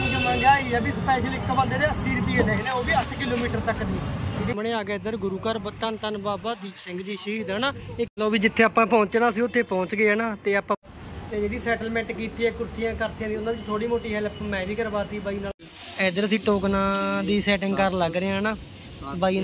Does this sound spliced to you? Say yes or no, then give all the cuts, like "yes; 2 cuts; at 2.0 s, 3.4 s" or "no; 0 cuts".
yes; 4 cuts; at 4.5 s, 8.1 s, 10.8 s, 15.5 s